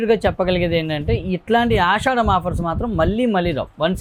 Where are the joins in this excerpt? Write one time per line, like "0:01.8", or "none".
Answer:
none